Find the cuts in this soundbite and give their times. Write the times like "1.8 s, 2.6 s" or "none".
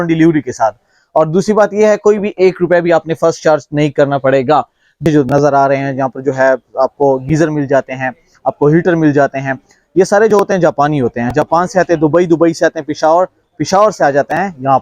5.0 s

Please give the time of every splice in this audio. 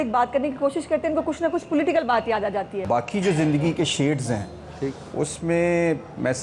2.8 s

